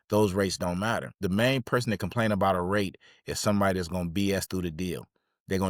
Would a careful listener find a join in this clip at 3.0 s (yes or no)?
no